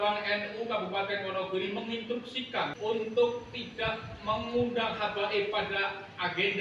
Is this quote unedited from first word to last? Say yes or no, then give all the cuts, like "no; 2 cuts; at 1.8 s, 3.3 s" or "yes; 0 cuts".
no; 1 cut; at 3.1 s